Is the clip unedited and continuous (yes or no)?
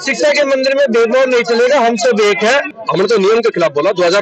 no